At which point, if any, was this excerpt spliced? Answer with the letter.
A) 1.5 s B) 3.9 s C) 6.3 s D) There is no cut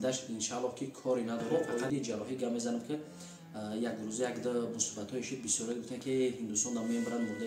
A